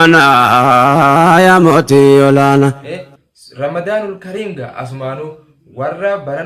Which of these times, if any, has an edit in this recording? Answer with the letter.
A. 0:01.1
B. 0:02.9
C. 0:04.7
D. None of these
B